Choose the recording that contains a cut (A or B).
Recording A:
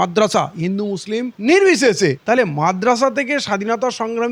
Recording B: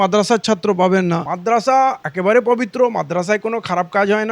B